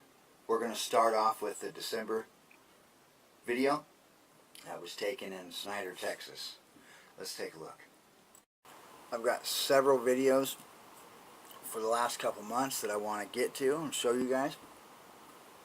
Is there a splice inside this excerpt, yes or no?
yes